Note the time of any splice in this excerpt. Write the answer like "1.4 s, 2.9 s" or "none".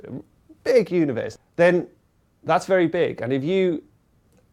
1.3 s